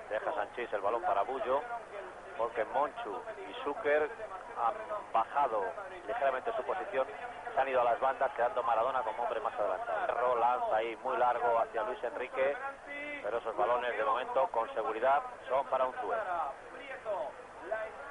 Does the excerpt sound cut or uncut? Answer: uncut